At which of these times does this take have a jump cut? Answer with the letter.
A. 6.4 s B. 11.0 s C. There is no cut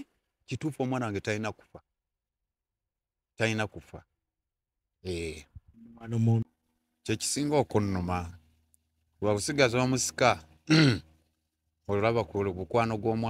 A